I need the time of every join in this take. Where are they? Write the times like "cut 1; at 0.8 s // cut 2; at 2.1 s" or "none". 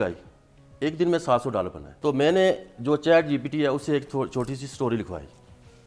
cut 1; at 1.9 s